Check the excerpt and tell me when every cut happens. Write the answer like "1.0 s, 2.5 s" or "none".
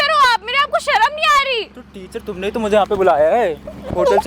none